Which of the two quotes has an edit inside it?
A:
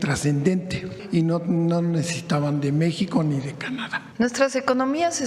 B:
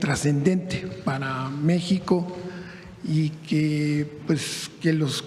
A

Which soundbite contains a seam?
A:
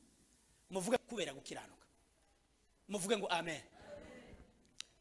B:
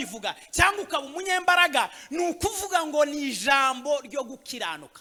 A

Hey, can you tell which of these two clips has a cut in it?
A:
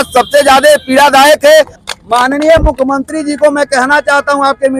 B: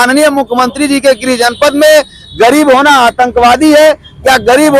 A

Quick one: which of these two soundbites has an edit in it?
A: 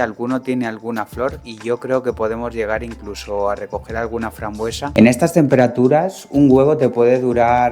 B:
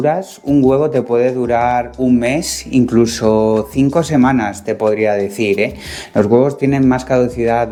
A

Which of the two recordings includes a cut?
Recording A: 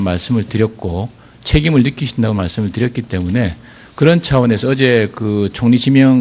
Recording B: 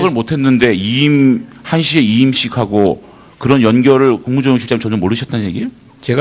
A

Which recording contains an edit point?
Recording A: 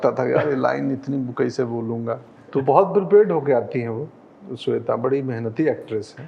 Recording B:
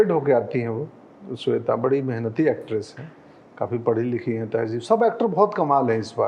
A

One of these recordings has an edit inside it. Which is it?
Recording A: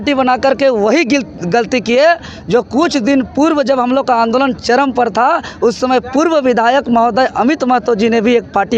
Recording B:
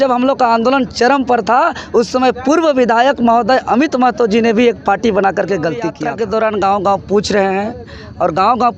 B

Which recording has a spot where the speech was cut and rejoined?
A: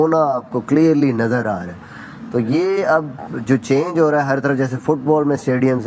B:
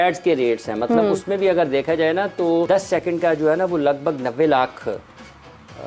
B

